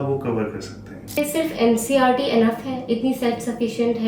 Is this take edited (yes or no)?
yes